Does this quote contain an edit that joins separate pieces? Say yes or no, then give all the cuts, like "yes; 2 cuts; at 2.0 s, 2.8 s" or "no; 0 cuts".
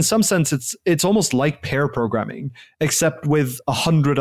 no; 0 cuts